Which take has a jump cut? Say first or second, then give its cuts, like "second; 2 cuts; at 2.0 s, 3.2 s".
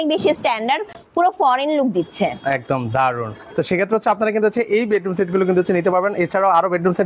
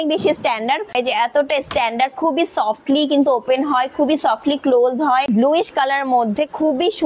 second; 2 cuts; at 0.9 s, 5.3 s